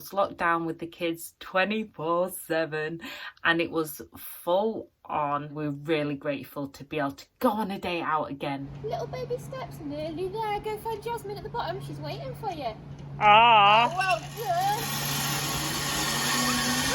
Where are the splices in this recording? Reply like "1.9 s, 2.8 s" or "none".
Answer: 5.5 s, 8.7 s